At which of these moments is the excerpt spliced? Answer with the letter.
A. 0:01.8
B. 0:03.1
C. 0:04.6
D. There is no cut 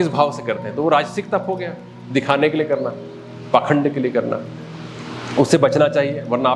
D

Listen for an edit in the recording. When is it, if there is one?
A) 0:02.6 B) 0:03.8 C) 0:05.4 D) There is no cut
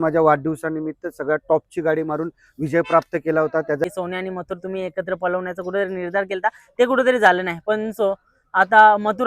B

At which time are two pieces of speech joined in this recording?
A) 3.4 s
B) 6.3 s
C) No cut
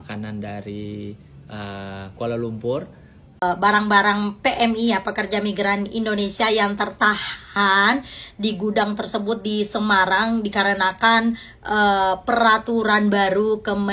A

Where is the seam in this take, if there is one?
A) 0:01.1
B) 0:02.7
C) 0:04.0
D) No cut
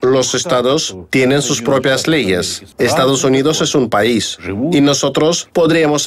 B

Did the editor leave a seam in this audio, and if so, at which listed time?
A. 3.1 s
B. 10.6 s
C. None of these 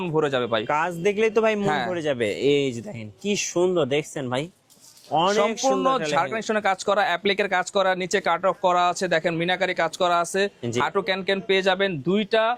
C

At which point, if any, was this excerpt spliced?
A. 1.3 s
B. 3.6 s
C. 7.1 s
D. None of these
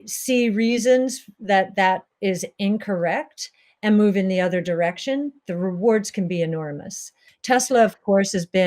C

